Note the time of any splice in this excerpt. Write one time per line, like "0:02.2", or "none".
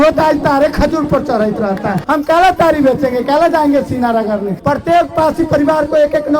0:02.0
0:04.5

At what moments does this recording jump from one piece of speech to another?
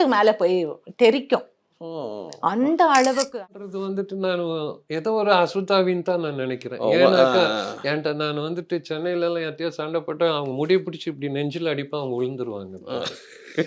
0:03.5

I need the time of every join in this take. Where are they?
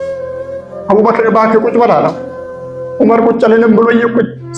none

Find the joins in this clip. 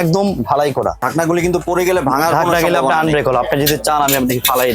0:01.0

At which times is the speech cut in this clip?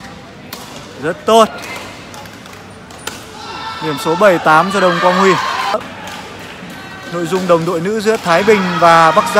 0:05.7

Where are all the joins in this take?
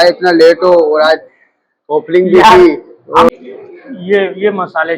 0:03.3

